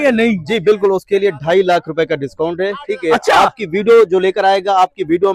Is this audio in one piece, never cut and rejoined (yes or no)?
yes